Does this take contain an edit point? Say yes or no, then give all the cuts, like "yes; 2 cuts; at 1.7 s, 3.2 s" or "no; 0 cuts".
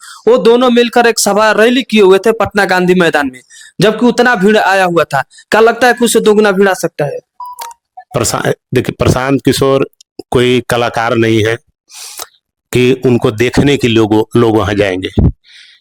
no; 0 cuts